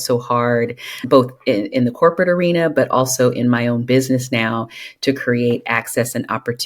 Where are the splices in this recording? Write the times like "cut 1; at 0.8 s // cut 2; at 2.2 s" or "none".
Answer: cut 1; at 0.9 s